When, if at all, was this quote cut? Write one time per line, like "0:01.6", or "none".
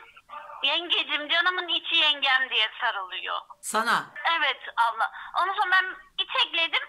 0:03.5
0:04.1